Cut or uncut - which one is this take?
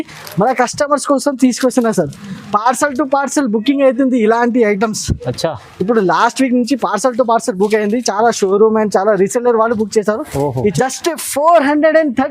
cut